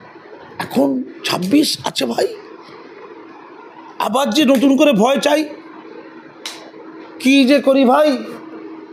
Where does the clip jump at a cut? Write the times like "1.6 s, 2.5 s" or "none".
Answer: none